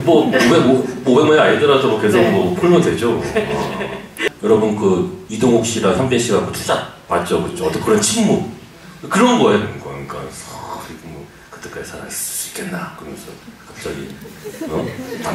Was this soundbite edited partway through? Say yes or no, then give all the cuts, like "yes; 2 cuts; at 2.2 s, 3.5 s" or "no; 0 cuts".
yes; 1 cut; at 4.3 s